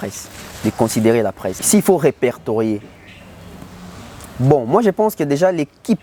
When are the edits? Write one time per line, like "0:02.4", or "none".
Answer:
0:01.6